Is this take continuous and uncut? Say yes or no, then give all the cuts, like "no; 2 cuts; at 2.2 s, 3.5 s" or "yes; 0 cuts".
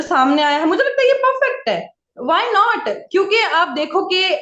yes; 0 cuts